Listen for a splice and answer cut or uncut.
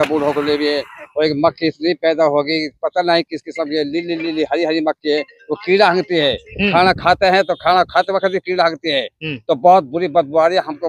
uncut